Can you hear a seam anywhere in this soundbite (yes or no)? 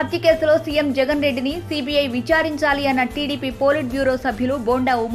no